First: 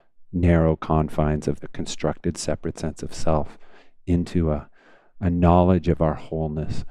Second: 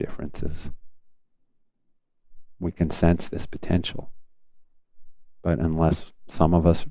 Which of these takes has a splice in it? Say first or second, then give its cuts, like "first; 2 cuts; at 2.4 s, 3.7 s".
first; 1 cut; at 1.6 s